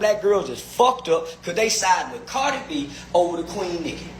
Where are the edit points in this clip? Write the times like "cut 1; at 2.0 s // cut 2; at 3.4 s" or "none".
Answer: none